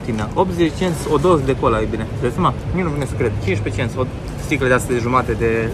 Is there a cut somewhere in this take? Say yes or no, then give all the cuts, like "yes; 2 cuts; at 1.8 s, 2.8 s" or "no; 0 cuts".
no; 0 cuts